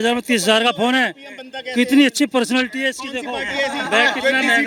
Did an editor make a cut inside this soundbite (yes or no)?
no